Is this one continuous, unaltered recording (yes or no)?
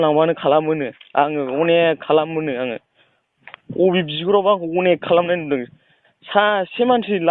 yes